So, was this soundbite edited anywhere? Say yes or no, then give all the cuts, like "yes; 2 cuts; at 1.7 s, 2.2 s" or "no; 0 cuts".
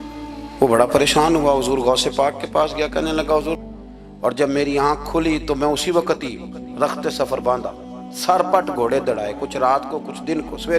yes; 1 cut; at 3.6 s